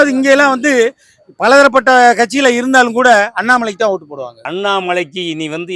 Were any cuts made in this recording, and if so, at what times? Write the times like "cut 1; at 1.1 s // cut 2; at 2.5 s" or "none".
cut 1; at 4.4 s